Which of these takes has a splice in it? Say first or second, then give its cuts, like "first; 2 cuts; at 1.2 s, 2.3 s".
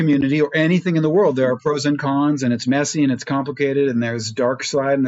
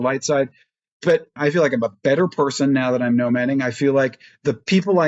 second; 1 cut; at 1.4 s